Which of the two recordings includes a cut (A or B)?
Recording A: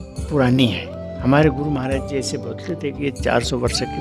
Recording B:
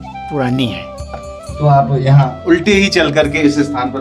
B